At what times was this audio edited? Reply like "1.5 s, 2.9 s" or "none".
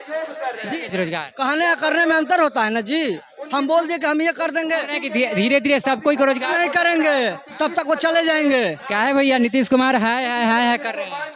none